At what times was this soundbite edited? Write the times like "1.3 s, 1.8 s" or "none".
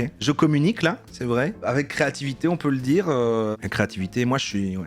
none